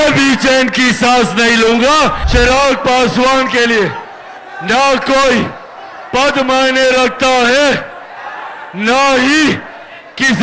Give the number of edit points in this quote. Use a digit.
1